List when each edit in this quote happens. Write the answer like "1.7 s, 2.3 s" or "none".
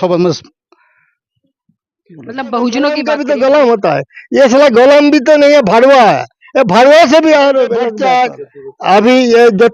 3.0 s, 8.0 s